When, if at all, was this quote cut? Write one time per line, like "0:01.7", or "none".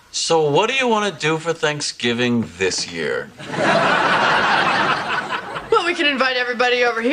0:02.3